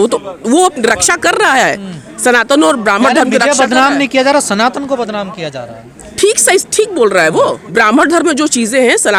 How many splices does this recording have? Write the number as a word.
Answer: zero